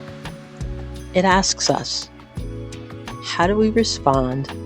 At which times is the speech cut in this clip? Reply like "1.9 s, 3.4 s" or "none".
1.9 s, 3.3 s